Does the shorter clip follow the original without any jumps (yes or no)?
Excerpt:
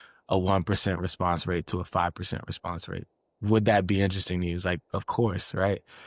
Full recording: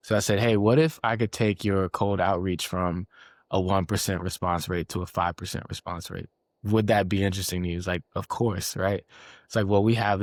yes